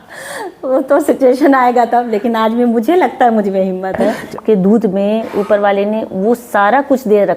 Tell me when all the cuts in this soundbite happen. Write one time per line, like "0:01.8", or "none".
0:04.3

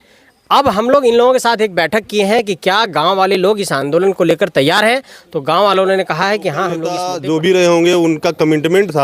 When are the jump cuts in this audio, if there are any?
0:07.0

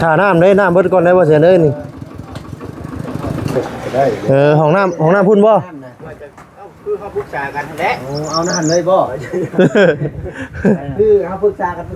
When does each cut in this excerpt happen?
0:03.6

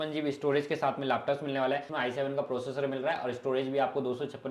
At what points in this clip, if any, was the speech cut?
0:01.9

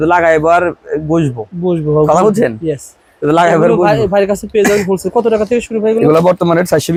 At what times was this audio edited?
none

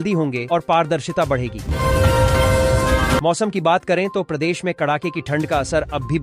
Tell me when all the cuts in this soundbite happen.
0:01.6
0:03.2

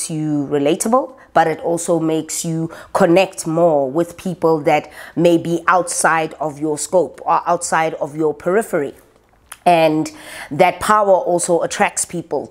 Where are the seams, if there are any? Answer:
none

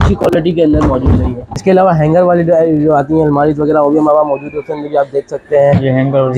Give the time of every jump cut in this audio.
0:01.5

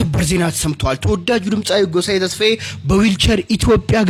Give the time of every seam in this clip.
none

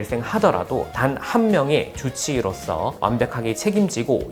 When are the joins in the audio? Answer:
none

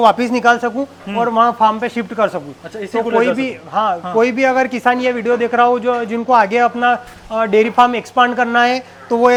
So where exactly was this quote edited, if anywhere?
none

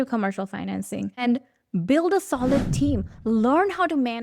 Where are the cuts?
none

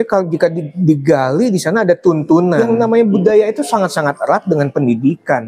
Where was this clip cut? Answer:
0:02.6

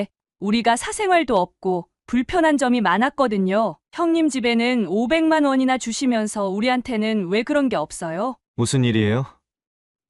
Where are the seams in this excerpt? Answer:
0:08.4

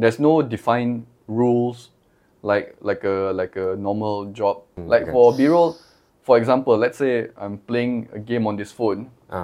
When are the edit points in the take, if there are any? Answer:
0:04.7

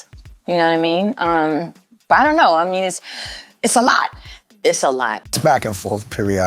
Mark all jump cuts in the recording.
0:05.2

